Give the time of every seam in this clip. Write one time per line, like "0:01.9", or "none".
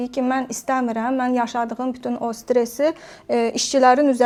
none